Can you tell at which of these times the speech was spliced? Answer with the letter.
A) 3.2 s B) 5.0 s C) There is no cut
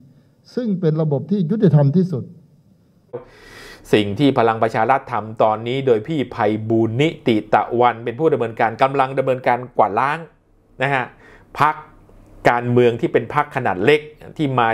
A